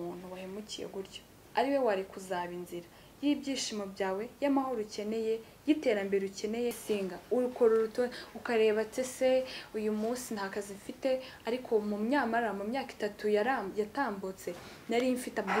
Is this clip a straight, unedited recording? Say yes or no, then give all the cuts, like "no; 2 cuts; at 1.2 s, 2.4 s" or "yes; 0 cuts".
no; 1 cut; at 6.8 s